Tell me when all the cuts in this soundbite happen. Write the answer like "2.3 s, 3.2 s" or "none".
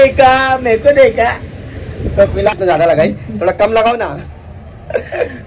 2.6 s